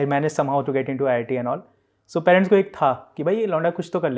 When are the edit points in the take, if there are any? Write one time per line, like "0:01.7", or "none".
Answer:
none